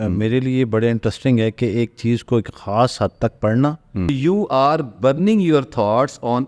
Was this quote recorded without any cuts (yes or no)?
no